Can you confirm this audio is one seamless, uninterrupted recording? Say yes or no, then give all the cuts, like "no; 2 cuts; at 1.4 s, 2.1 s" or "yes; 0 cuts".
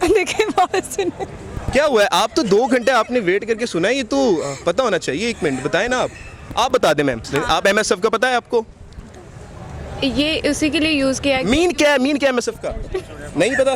no; 1 cut; at 7.3 s